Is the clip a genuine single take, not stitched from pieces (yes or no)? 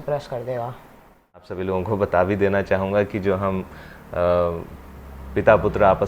no